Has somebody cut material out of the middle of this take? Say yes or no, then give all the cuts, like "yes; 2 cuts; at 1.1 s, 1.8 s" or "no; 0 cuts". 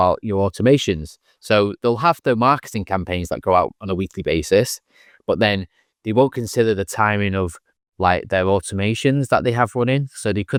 no; 0 cuts